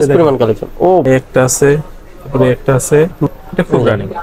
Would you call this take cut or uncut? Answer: cut